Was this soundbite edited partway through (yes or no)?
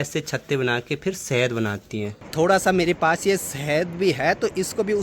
yes